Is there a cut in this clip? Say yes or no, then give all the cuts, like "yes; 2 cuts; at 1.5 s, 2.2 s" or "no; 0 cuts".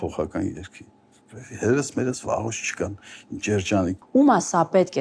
yes; 1 cut; at 4.0 s